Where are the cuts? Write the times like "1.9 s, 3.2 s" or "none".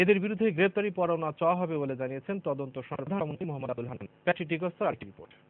1.9 s